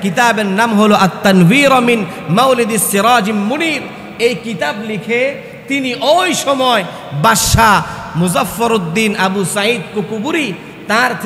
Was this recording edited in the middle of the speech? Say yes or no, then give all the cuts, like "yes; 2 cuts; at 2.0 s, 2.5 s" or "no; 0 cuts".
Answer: no; 0 cuts